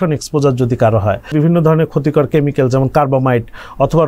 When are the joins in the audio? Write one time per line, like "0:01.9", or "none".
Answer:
0:01.3